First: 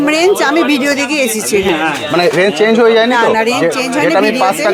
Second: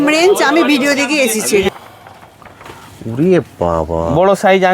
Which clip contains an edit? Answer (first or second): second